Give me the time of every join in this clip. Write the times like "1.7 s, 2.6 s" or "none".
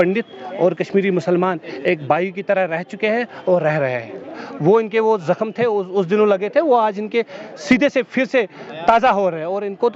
none

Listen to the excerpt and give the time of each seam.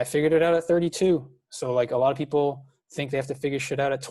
none

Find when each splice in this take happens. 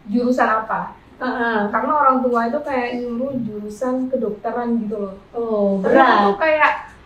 none

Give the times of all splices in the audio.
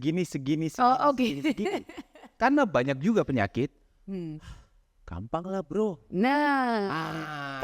none

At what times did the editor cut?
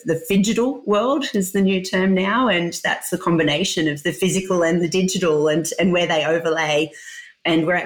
none

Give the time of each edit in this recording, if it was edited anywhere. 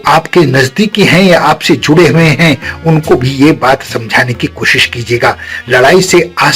none

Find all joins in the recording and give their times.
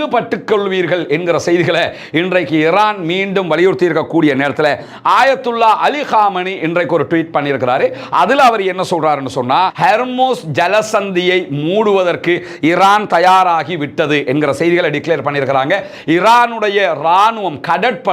9.7 s

